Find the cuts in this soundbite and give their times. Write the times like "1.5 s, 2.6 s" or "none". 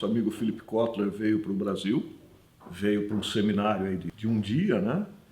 4.1 s